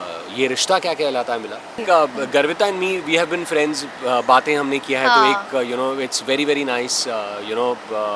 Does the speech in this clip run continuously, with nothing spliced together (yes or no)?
no